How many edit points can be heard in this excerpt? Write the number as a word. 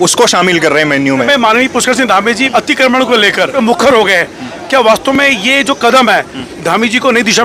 three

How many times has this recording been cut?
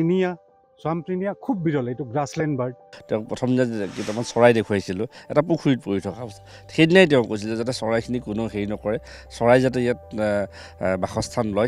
one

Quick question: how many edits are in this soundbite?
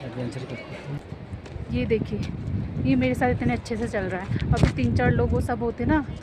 one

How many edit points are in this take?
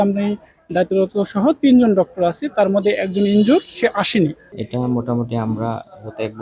one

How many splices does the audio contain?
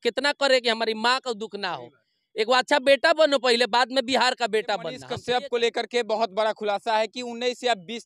one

